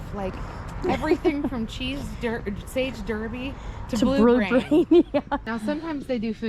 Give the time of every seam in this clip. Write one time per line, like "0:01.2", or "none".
0:05.5